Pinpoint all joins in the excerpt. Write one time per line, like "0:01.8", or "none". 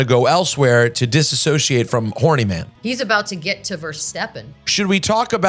0:02.7
0:04.8

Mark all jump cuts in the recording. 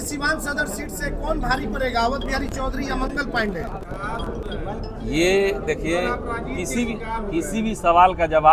none

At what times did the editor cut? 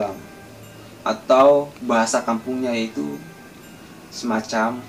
none

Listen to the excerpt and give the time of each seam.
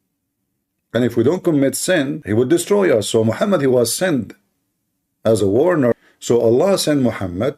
0:02.2
0:05.9

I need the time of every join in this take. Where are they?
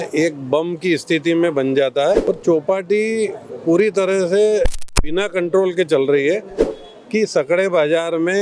0:02.2
0:06.7

